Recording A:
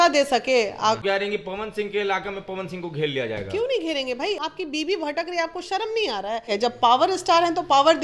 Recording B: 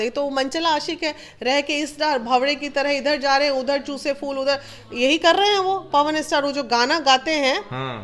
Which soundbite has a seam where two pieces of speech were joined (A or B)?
A